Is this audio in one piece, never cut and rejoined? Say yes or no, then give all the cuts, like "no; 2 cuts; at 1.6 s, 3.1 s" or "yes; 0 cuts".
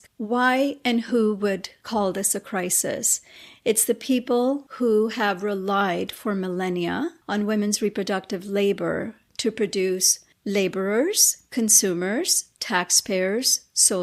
yes; 0 cuts